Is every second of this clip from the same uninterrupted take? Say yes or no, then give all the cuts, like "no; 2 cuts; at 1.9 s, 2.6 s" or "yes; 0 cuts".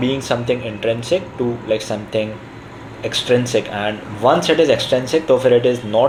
yes; 0 cuts